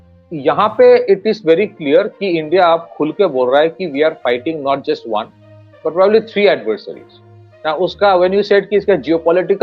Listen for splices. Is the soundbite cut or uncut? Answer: uncut